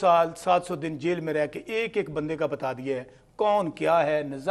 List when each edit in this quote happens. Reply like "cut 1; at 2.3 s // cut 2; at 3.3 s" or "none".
none